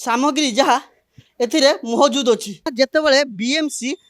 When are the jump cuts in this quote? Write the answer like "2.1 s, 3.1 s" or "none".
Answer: 2.7 s